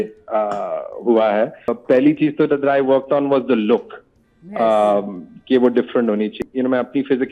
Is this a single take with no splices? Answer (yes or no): no